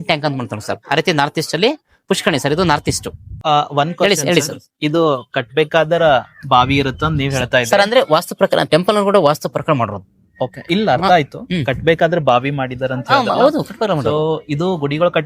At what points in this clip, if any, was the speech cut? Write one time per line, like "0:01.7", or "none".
0:03.2